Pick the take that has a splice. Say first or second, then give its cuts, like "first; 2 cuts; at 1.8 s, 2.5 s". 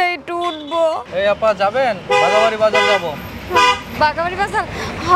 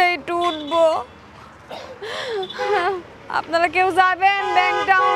first; 1 cut; at 1.0 s